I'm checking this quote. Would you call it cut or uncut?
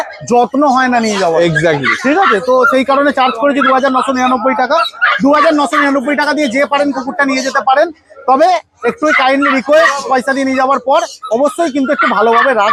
uncut